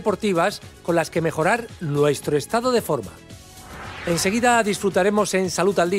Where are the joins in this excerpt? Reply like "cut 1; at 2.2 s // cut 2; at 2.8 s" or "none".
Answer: cut 1; at 3.4 s